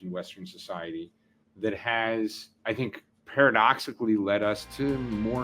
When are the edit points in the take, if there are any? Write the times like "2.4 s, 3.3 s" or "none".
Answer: 2.5 s